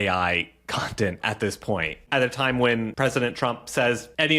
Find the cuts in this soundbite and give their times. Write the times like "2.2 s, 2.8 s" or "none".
2.0 s, 2.9 s